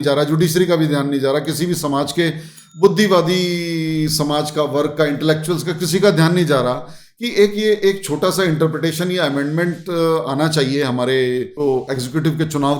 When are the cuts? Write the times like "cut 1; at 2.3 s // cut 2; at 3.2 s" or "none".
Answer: none